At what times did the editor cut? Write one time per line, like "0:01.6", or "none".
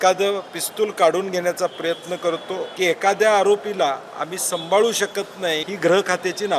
0:02.6
0:05.7